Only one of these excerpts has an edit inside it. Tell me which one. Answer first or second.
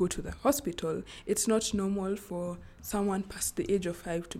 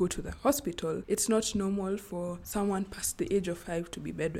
second